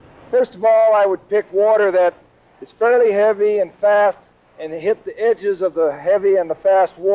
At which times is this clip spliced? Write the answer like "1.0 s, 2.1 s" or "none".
5.1 s